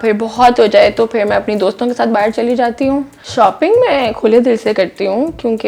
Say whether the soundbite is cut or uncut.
cut